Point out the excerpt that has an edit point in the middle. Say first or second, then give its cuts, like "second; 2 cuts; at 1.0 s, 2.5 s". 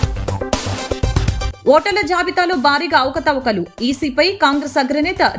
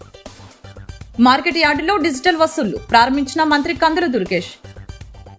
first; 1 cut; at 1.5 s